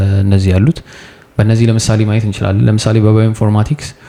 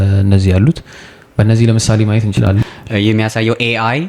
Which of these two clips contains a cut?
second; 1 cut; at 2.6 s

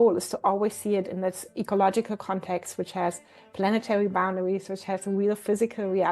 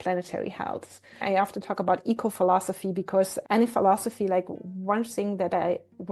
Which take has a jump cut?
second; 2 cuts; at 1.2 s, 3.4 s

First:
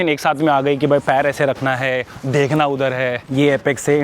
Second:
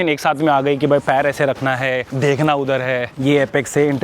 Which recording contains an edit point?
second; 1 cut; at 2.1 s

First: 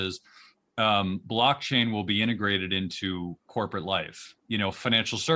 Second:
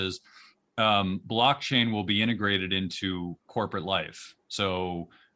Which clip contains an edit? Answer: first; 1 cut; at 4.4 s

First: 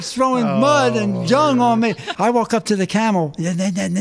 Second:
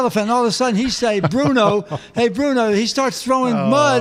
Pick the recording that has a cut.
first; 1 cut; at 2.1 s

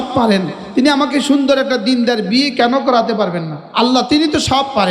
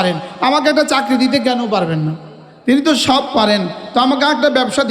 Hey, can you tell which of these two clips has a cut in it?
first; 1 cut; at 3.7 s

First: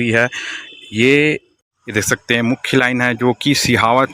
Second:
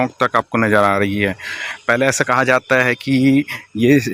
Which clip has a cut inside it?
first; 1 cut; at 1.6 s

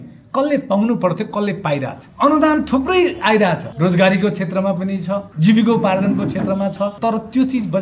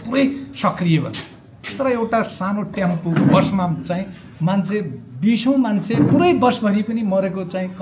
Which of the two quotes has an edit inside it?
first; 4 cuts; at 2.0 s, 3.7 s, 5.3 s, 7.0 s

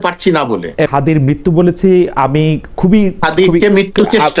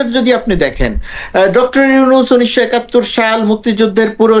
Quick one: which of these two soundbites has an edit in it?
first; 1 cut; at 0.9 s

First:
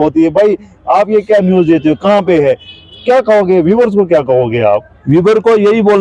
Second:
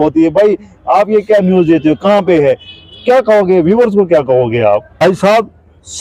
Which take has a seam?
second; 1 cut; at 5.0 s

